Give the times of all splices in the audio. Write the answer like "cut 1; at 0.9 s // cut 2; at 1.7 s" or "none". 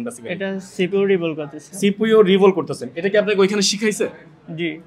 none